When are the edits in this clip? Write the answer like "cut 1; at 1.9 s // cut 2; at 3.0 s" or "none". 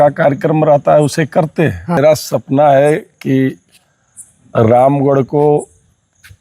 cut 1; at 2.0 s